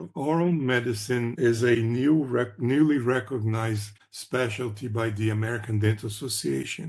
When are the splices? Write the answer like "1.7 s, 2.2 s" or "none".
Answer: 1.3 s